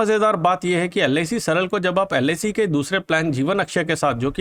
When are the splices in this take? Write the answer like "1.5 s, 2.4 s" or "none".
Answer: none